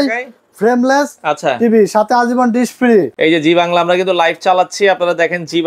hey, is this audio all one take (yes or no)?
no